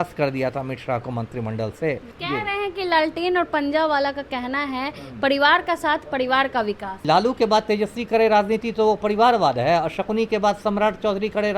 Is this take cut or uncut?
cut